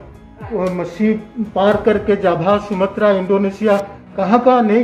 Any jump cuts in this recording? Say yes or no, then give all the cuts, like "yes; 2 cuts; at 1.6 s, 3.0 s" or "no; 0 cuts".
no; 0 cuts